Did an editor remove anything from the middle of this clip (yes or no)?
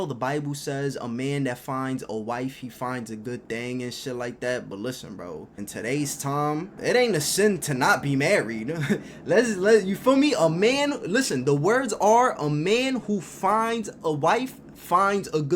yes